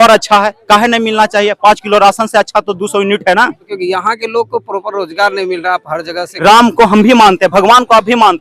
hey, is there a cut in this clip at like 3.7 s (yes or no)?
yes